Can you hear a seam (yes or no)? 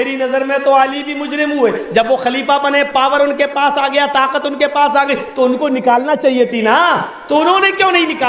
no